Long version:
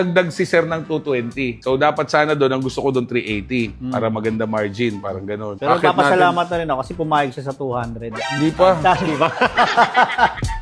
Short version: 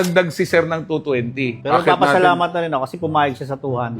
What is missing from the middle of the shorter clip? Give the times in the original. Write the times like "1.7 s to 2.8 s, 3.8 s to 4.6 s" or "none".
1.6 s to 5.5 s